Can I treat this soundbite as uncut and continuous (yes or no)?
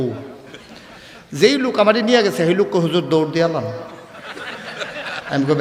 yes